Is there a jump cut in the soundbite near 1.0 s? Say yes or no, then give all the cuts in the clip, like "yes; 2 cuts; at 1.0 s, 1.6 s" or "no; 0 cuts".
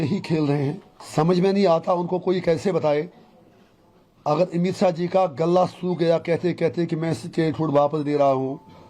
yes; 1 cut; at 1.0 s